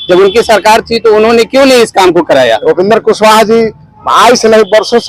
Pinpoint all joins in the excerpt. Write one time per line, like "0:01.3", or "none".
0:02.6